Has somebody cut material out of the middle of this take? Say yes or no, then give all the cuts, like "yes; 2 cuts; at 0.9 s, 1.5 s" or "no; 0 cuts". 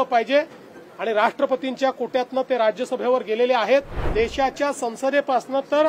yes; 1 cut; at 4.0 s